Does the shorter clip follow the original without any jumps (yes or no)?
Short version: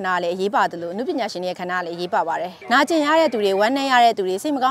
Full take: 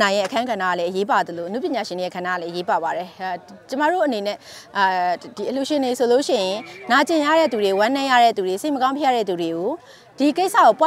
no